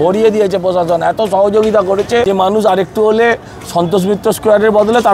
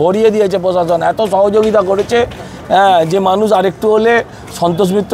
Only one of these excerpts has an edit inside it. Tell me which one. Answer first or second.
first